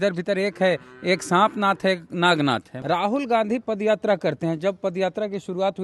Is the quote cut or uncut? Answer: cut